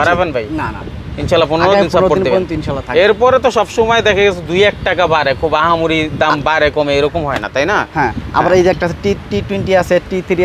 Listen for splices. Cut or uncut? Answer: uncut